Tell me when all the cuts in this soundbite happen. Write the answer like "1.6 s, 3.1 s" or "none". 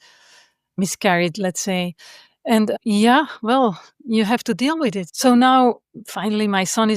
0.8 s, 5.1 s, 5.9 s